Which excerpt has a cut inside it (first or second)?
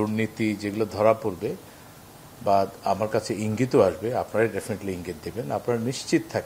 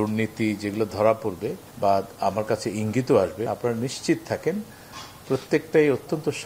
second